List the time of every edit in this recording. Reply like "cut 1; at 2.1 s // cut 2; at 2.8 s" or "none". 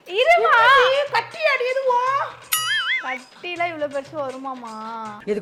none